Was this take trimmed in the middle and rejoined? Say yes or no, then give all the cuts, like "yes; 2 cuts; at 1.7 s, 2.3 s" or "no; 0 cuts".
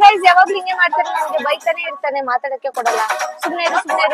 no; 0 cuts